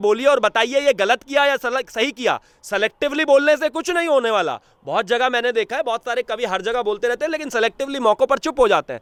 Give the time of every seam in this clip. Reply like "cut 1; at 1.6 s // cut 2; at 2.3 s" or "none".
none